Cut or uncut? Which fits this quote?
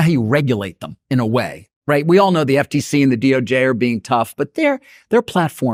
uncut